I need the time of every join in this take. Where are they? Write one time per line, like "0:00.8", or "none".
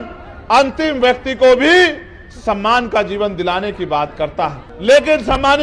0:04.7

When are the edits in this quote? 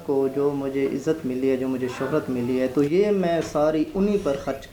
none

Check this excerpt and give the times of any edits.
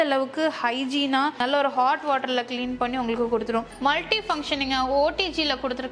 0:03.7

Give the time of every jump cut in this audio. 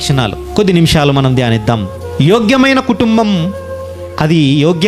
none

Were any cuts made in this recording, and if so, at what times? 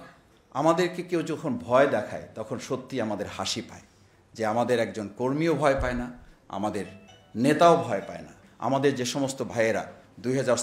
0:08.4

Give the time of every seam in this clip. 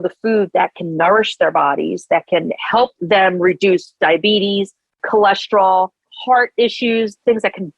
0:03.0
0:06.1

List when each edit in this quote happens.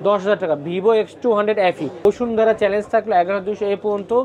0:02.1

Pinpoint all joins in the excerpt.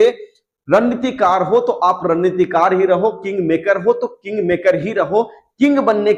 none

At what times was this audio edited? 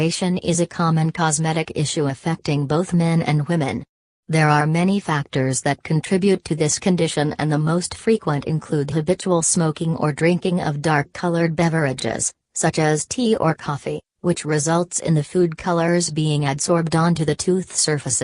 0:01.8

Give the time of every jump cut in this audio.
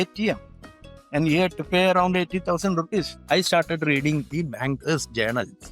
0:03.1

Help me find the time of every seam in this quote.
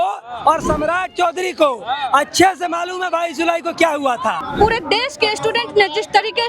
0:04.5

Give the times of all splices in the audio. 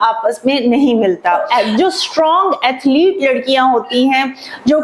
0:01.4

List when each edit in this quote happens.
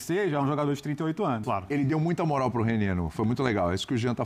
0:01.5

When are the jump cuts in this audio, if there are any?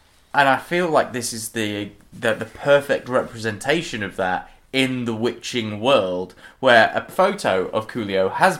0:07.1

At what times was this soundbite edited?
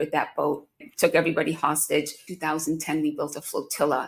0:00.8
0:02.3

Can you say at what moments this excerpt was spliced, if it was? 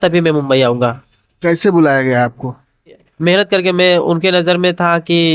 0:03.1

